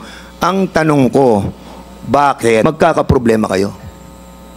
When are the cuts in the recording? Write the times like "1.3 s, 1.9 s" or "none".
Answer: 2.6 s